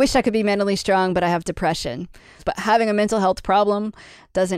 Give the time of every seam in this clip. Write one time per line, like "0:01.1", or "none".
0:02.4

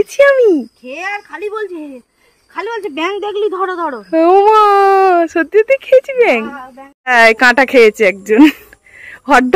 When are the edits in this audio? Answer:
0:07.1

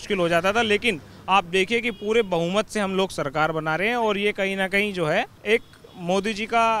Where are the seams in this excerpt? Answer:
0:05.4

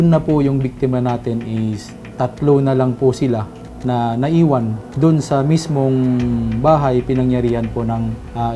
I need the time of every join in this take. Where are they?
none

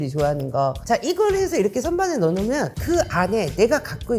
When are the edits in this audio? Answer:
0:02.7

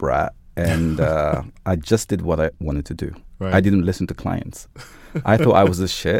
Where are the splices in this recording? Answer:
0:02.6

